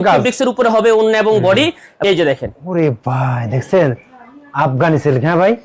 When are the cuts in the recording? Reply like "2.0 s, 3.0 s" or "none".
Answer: 2.0 s